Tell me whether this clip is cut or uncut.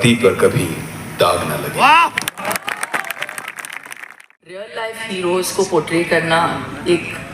cut